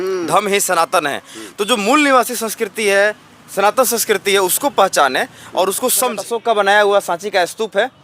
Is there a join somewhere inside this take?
yes; 1 cut; at 6.3 s

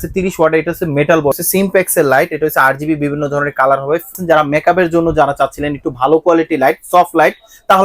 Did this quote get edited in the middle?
yes; 2 cuts; at 1.3 s, 4.2 s

